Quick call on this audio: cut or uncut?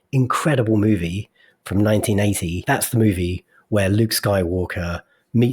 cut